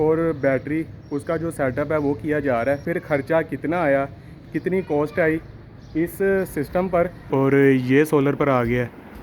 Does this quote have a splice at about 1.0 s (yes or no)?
no